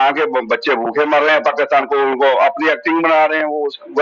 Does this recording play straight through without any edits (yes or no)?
yes